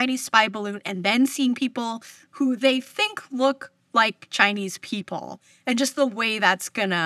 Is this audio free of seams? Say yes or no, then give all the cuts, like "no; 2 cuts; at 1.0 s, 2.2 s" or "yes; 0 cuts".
yes; 0 cuts